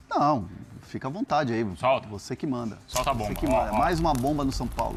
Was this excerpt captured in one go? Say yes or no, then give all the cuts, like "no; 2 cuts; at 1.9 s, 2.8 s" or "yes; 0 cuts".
yes; 0 cuts